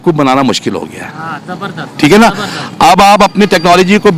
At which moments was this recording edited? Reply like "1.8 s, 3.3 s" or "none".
none